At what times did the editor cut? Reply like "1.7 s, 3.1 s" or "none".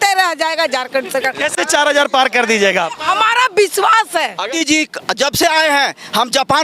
4.5 s

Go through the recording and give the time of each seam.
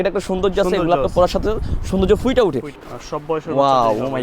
2.7 s

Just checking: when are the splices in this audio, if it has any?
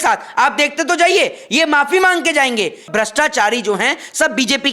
2.9 s

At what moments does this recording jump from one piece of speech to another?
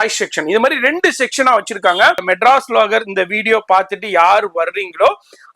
2.2 s

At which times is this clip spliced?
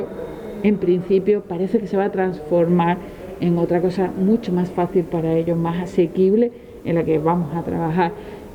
none

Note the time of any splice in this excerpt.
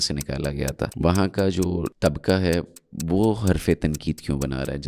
0.9 s, 1.9 s

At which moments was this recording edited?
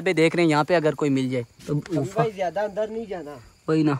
1.7 s

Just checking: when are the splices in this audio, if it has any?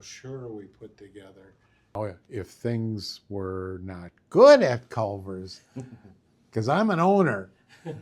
1.9 s

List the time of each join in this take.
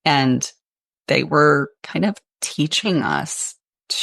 1.8 s

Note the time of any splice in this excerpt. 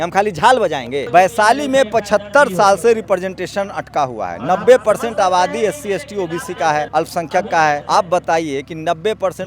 1.1 s, 6.9 s, 7.8 s

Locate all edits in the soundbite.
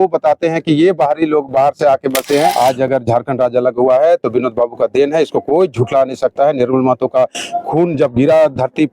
2.5 s

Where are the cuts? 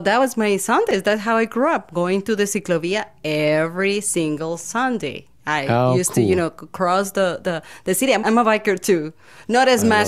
8.2 s

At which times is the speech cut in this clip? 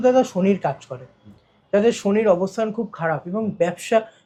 none

